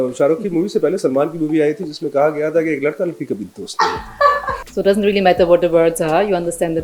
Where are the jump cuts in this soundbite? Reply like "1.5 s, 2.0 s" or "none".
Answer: 4.5 s